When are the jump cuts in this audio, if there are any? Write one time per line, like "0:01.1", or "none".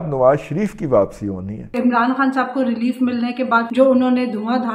0:01.7
0:03.7